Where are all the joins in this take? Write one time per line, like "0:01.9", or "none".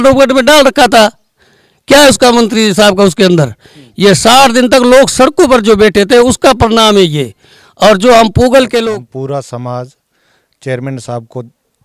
0:08.9